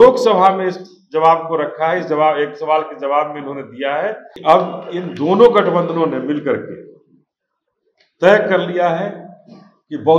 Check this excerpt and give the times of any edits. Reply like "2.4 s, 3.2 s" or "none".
4.3 s